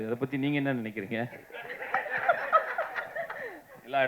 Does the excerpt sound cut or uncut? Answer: uncut